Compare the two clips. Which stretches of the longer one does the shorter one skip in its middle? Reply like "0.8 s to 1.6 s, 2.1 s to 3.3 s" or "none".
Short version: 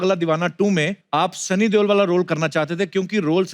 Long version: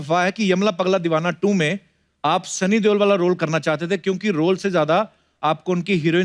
1.8 s to 2.1 s